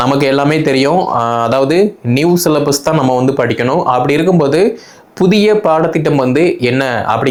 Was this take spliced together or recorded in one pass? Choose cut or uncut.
uncut